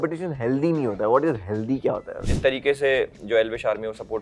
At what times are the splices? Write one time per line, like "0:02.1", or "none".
0:02.1